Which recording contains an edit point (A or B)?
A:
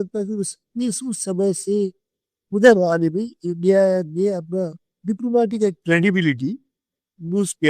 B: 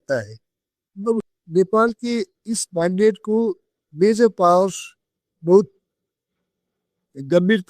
B